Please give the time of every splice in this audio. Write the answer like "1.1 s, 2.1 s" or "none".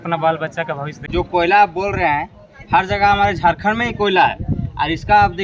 0.9 s